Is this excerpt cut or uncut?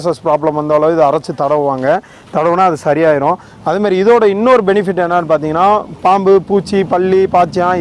uncut